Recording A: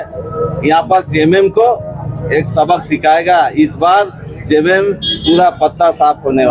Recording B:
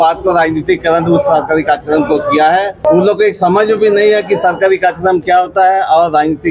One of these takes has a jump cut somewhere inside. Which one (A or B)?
B